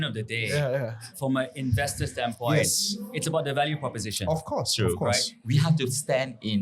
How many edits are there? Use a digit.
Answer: 2